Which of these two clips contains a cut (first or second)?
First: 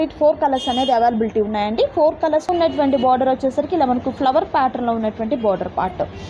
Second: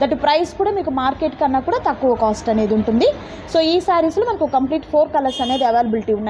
first